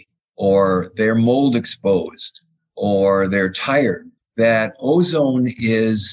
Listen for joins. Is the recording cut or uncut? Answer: uncut